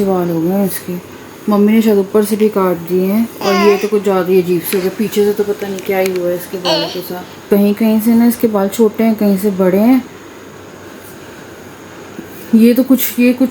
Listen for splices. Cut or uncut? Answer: cut